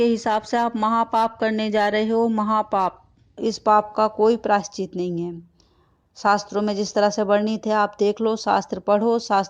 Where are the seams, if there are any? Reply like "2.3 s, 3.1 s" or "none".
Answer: 3.4 s